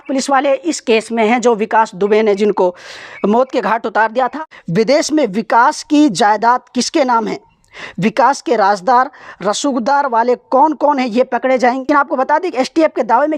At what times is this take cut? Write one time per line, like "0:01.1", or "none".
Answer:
0:04.3
0:11.9